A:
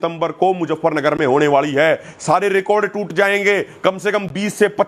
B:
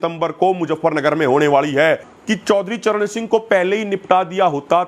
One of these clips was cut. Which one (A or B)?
B